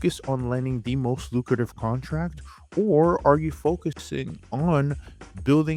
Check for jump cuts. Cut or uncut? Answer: uncut